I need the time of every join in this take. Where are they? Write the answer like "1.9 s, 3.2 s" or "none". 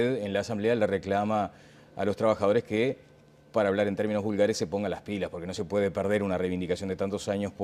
none